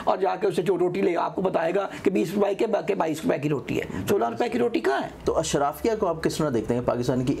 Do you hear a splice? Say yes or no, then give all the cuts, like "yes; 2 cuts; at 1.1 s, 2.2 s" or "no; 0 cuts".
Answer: yes; 1 cut; at 5.1 s